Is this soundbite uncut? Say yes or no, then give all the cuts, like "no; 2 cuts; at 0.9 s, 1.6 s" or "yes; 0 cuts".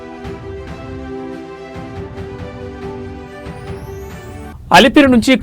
no; 1 cut; at 4.5 s